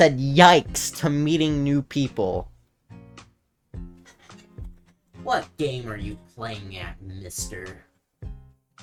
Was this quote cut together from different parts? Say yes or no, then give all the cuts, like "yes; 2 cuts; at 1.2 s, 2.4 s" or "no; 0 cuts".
no; 0 cuts